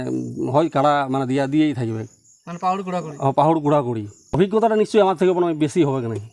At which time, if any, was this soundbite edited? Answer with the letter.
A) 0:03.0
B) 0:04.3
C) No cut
B